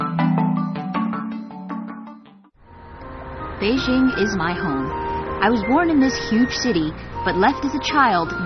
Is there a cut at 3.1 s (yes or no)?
yes